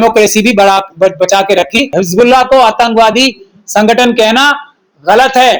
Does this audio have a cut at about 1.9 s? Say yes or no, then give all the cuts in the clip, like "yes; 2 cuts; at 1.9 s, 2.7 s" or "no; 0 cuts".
yes; 1 cut; at 1.9 s